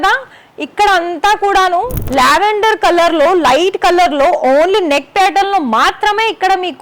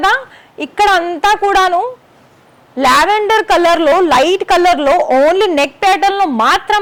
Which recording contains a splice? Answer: first; 1 cut; at 2.0 s

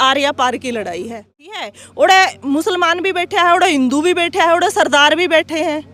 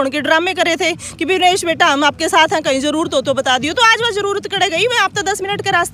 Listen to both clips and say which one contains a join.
first; 1 cut; at 1.6 s

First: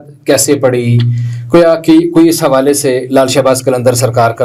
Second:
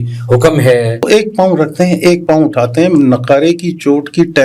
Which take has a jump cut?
second; 1 cut; at 1.0 s

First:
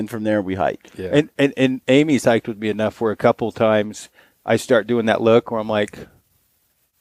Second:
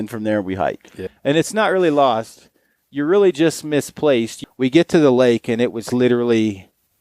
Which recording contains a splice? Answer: second; 2 cuts; at 0.9 s, 4.4 s

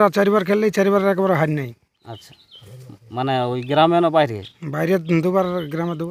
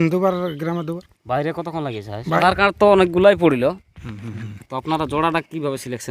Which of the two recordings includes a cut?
second; 1 cut; at 2.4 s

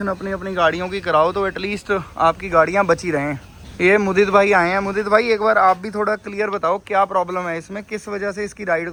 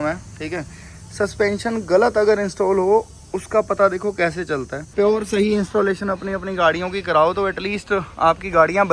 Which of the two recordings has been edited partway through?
second; 1 cut; at 4.8 s

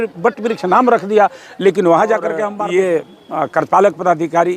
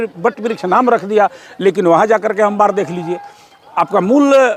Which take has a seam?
first; 1 cut; at 2.5 s

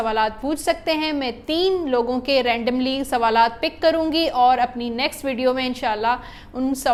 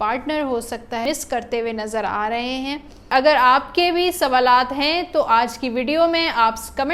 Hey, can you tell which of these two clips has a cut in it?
second; 2 cuts; at 1.1 s, 3.1 s

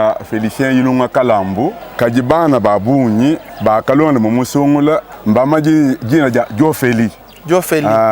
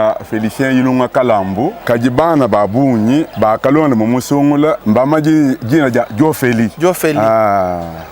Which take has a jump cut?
second; 4 cuts; at 1.8 s, 3.3 s, 4.8 s, 6.7 s

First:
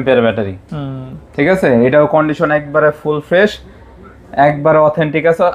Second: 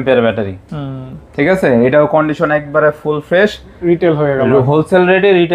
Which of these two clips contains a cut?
second; 1 cut; at 3.7 s

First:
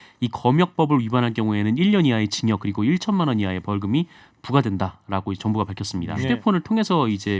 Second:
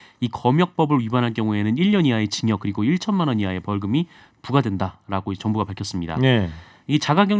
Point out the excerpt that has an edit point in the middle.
first; 1 cut; at 6.2 s

